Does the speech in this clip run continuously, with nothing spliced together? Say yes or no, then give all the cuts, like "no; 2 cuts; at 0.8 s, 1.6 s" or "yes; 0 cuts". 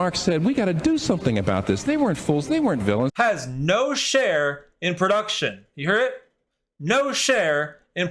no; 1 cut; at 3.1 s